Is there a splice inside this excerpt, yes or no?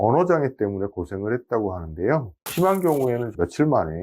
yes